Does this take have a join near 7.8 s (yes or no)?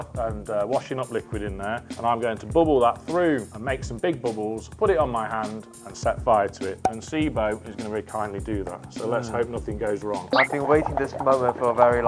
no